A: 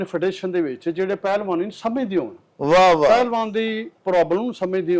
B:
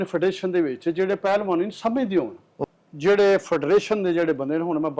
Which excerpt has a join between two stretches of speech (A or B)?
B